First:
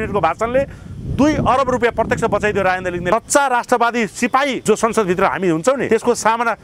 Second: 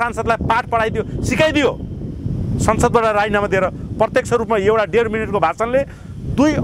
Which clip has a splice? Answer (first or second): first